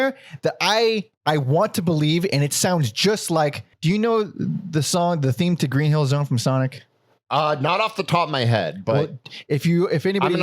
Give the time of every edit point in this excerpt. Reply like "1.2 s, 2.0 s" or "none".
1.1 s, 3.7 s